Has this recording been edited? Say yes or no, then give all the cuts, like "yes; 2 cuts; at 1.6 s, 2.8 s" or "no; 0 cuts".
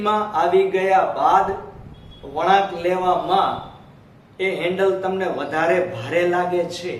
no; 0 cuts